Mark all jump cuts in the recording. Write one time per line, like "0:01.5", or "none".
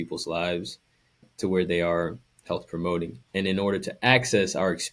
0:01.3
0:03.2